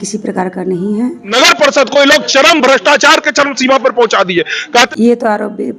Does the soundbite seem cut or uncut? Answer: cut